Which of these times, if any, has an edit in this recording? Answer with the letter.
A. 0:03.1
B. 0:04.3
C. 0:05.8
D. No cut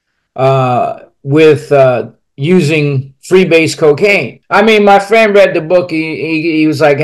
B